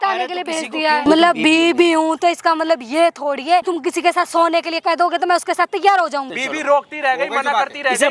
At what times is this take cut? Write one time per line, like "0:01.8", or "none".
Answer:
0:01.1
0:03.7
0:06.4

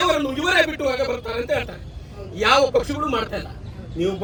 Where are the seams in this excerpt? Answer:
none

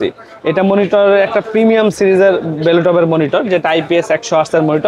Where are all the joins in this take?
none

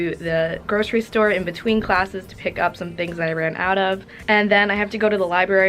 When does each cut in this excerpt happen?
0:04.1

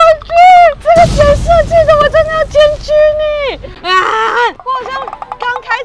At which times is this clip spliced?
0:03.7

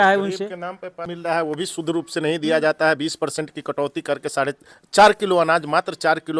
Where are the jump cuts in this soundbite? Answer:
0:01.0

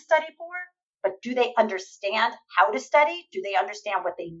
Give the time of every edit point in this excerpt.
none

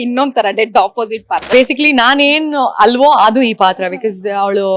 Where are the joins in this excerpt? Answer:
0:01.5

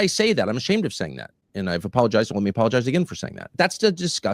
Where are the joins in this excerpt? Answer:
0:03.4

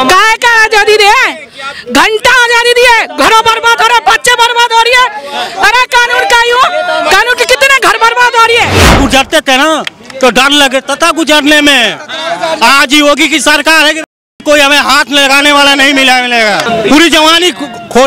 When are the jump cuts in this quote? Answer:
0:09.0
0:16.7

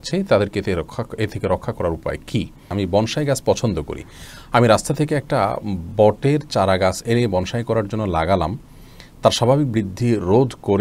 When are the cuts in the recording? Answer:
0:02.7

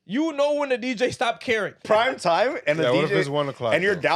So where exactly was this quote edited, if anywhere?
0:01.8

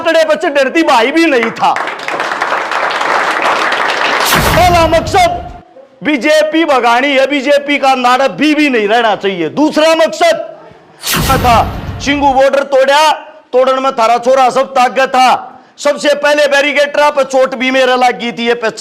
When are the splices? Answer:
0:04.6
0:11.2

